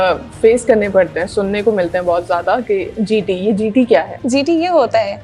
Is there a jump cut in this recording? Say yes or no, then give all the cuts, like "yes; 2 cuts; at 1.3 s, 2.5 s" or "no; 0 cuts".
yes; 1 cut; at 4.1 s